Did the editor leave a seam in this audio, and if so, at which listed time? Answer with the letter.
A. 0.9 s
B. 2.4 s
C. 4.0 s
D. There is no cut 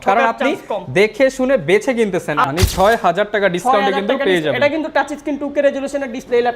B